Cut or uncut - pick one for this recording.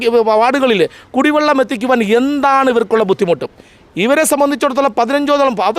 uncut